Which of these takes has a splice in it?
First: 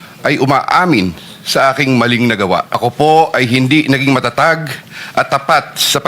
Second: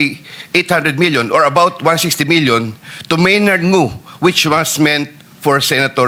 first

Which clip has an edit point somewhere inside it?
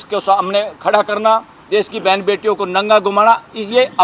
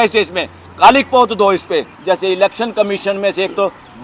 second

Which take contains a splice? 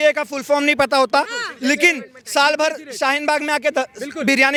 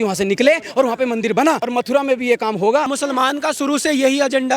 second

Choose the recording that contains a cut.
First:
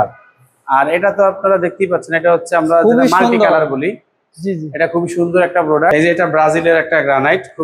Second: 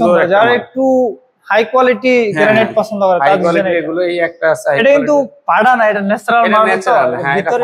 first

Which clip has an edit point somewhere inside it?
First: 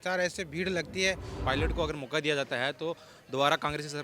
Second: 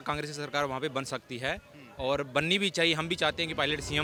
first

